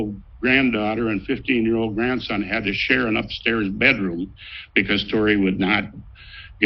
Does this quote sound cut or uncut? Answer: uncut